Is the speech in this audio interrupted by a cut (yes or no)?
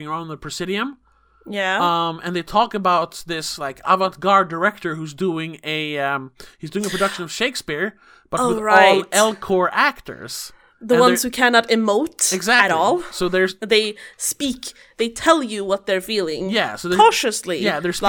no